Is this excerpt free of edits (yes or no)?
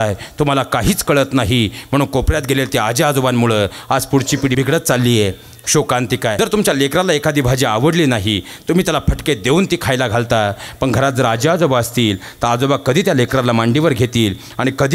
no